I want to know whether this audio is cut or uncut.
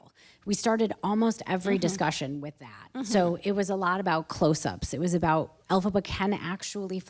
cut